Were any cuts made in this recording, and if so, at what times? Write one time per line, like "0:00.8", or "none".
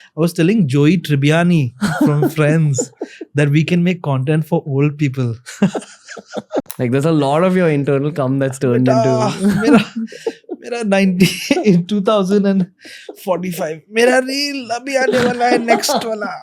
0:06.7